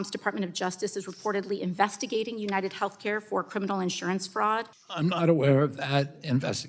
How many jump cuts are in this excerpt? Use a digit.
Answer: 1